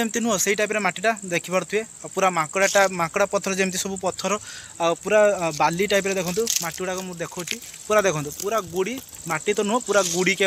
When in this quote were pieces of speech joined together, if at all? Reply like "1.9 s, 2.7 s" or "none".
none

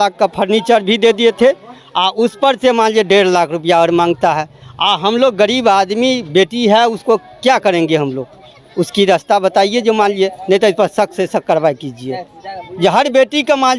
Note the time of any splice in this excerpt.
none

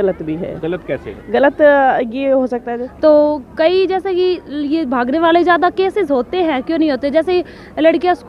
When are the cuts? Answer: 2.8 s

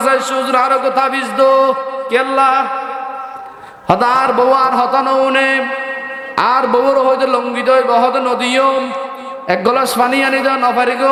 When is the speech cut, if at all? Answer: none

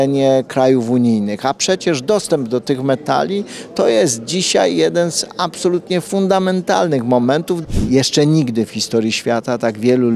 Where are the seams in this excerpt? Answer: 7.5 s

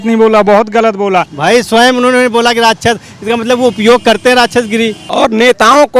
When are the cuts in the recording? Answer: 1.3 s, 5.1 s

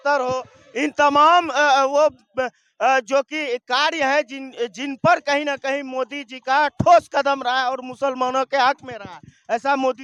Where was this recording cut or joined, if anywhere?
none

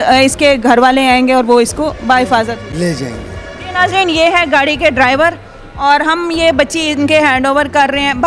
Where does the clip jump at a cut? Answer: none

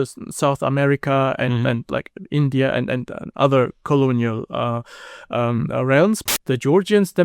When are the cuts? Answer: 6.2 s

